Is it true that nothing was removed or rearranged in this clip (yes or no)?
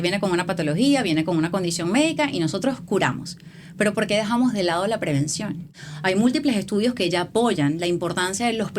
no